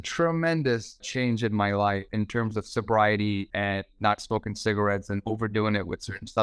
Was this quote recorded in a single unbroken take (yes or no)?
no